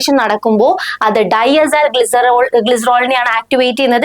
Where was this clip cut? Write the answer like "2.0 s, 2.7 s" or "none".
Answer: none